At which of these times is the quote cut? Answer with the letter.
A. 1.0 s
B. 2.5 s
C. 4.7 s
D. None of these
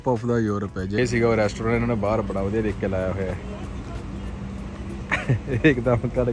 A